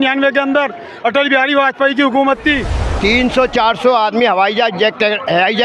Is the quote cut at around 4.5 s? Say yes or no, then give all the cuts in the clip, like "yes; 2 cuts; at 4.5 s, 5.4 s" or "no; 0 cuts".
no; 1 cut; at 2.9 s